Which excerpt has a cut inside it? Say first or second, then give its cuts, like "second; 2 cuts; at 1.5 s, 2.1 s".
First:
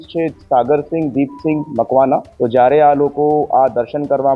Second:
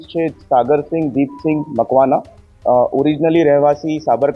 first; 1 cut; at 2.3 s